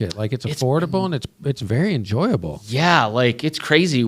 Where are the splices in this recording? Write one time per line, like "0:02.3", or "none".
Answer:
none